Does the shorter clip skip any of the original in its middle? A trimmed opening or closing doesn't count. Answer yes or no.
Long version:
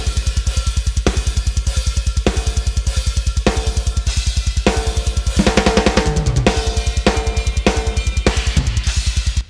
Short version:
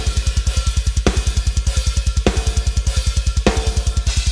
no